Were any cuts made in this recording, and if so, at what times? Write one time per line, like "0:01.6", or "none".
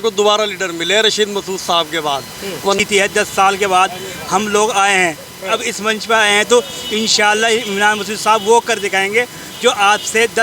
0:02.8